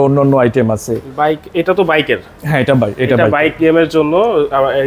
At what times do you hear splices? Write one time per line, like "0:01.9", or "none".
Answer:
none

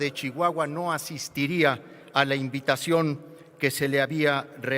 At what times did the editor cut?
none

